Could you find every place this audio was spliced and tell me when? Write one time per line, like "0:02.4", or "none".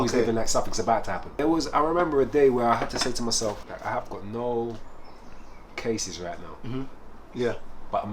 0:01.3
0:03.7